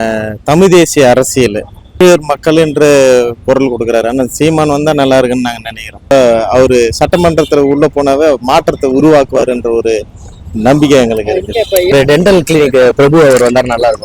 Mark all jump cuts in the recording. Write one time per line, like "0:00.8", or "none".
0:02.0
0:06.1
0:11.9